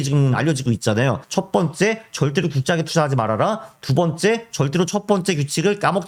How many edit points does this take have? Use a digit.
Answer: 0